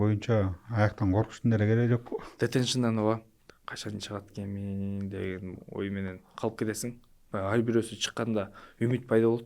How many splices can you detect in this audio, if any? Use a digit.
1